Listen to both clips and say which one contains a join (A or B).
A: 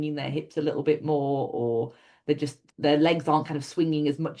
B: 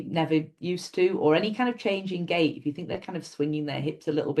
A